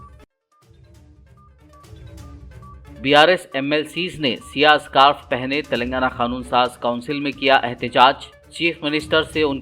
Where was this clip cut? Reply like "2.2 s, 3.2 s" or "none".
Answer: 2.7 s